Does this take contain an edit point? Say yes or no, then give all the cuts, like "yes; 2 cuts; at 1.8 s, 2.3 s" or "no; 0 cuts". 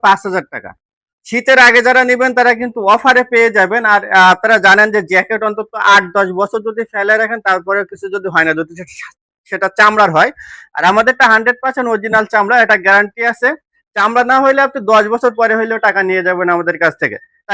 no; 0 cuts